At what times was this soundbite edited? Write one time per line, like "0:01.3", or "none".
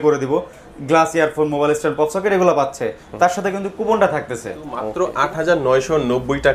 0:04.8